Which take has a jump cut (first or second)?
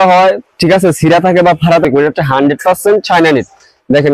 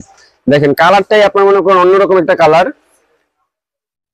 first